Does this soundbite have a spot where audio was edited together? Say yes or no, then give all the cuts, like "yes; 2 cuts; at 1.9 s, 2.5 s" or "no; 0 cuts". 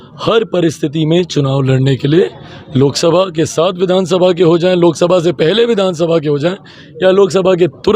no; 0 cuts